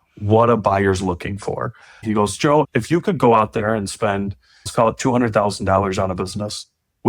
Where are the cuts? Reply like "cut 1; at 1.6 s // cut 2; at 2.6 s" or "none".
cut 1; at 1.9 s // cut 2; at 4.7 s